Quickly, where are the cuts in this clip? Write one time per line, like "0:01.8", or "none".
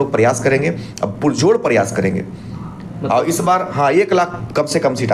none